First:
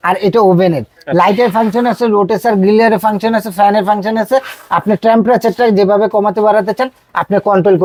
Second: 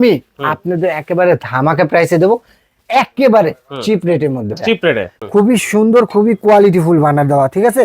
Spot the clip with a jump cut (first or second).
second